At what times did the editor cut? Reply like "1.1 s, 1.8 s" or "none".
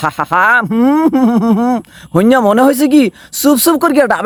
none